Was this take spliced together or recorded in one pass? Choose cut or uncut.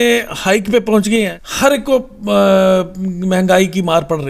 cut